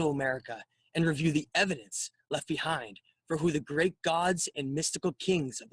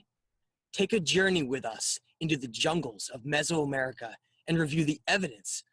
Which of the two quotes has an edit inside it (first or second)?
second